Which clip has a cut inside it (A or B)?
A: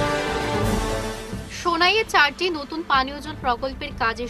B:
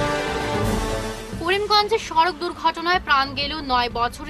B